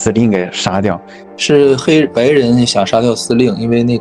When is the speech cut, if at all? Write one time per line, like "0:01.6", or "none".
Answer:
0:01.3